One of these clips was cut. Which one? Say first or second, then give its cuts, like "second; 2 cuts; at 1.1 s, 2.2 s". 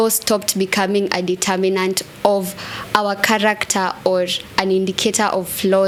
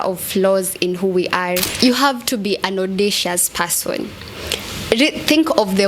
second; 1 cut; at 1.7 s